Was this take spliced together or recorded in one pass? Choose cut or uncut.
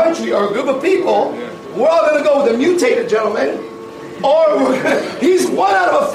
uncut